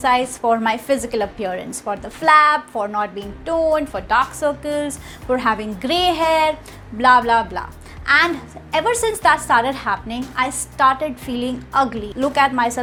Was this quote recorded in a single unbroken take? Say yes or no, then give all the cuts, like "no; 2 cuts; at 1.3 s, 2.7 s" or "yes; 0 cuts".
yes; 0 cuts